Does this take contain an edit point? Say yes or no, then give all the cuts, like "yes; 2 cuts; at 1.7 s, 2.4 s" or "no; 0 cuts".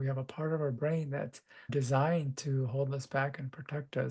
yes; 1 cut; at 1.7 s